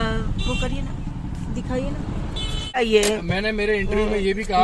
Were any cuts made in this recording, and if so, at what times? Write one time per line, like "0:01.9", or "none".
0:02.8

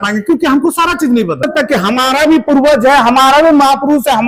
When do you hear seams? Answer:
0:01.5

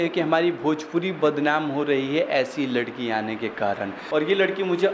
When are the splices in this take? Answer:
0:04.0

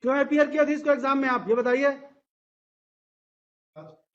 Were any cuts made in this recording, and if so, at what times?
none

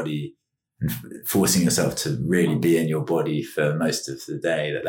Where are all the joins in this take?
none

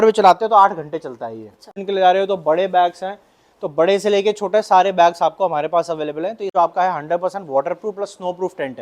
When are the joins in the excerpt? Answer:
0:01.8
0:06.5

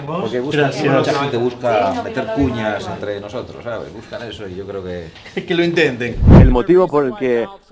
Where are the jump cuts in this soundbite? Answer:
0:06.2

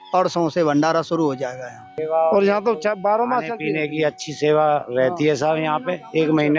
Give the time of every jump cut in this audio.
0:01.9

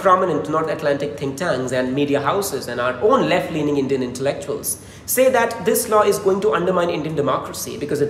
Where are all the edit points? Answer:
none

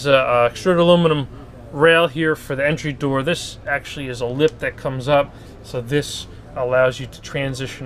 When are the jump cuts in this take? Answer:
none

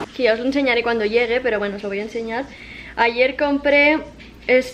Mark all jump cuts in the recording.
none

